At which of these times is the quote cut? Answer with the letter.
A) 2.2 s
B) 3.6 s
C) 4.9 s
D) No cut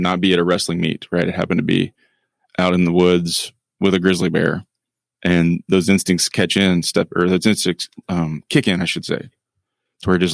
D